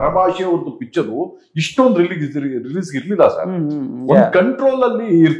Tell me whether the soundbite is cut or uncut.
uncut